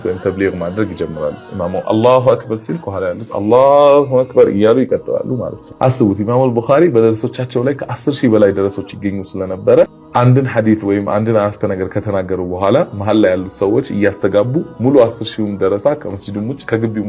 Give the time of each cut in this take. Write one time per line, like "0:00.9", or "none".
none

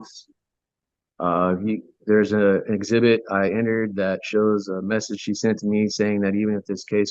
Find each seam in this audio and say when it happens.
none

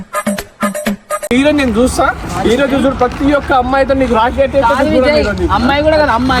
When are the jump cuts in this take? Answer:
none

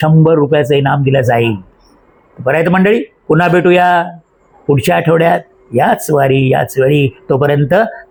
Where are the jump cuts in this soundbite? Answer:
none

